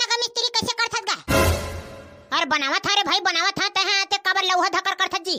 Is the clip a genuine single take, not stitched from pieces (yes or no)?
yes